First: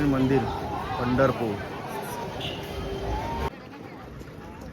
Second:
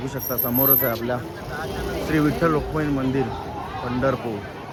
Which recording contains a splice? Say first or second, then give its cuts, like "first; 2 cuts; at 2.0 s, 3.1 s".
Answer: first; 1 cut; at 3.5 s